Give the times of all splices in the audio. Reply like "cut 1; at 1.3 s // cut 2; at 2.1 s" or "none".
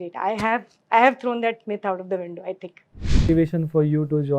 cut 1; at 3.2 s

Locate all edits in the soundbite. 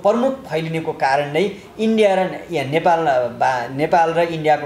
none

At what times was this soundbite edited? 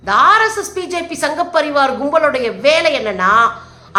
none

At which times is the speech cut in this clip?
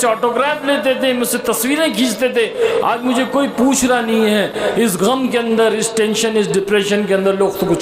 none

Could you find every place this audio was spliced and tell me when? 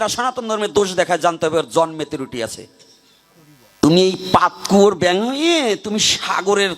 cut 1; at 3.8 s

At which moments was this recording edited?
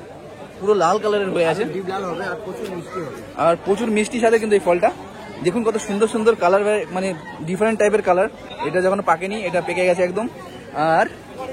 none

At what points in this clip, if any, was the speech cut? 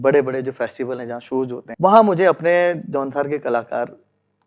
cut 1; at 1.6 s

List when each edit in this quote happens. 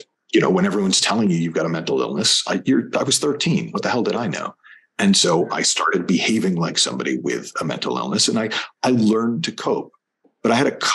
none

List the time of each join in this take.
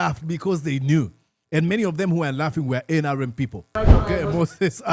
cut 1; at 3.7 s

